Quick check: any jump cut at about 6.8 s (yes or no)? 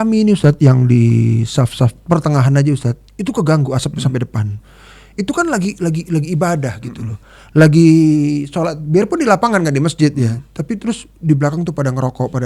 no